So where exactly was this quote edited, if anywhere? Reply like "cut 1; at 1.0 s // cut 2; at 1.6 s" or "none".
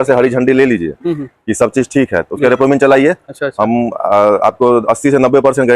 none